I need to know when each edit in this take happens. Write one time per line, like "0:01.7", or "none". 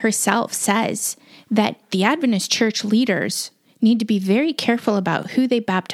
0:01.8